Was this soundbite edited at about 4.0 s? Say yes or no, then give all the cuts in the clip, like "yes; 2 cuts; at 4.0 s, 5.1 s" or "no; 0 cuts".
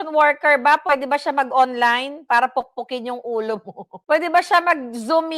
yes; 1 cut; at 4.0 s